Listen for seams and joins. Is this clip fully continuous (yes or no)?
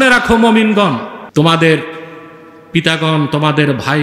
no